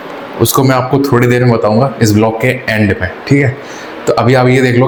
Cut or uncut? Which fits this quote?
uncut